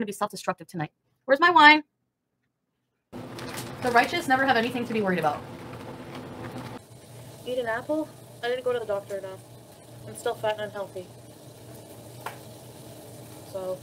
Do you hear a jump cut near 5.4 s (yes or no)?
no